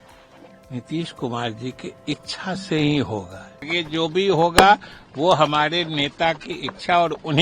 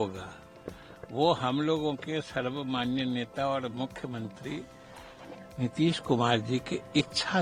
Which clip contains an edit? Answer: first; 1 cut; at 3.8 s

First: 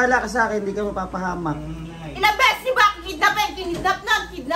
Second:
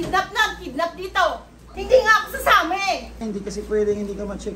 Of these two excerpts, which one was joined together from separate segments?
second; 2 cuts; at 1.8 s, 3.2 s

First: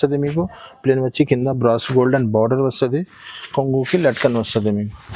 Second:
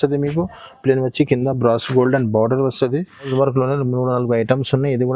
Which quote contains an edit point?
second; 1 cut; at 3.3 s

